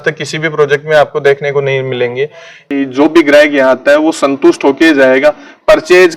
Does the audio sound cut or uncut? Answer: cut